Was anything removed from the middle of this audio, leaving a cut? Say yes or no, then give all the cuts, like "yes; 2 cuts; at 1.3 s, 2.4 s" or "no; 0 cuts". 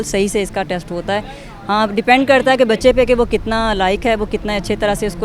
no; 0 cuts